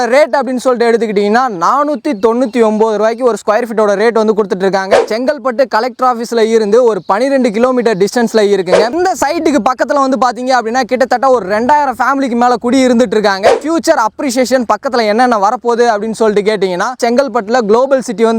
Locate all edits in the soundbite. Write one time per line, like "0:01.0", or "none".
0:05.0
0:09.0
0:13.6
0:17.0